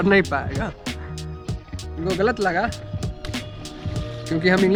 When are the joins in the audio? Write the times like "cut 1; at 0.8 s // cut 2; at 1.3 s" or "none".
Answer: none